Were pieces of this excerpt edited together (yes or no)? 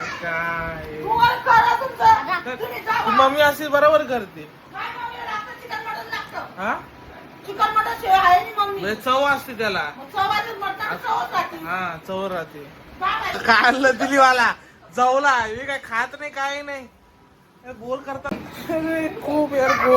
yes